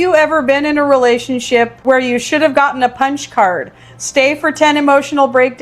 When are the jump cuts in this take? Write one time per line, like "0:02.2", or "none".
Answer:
0:01.8